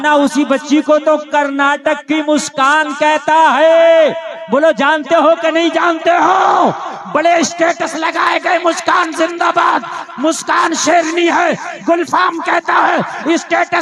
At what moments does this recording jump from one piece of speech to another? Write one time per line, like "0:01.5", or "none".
none